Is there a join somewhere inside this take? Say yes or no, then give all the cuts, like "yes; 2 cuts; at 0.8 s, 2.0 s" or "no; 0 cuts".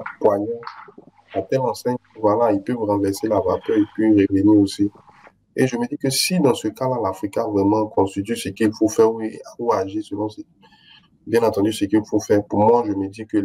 no; 0 cuts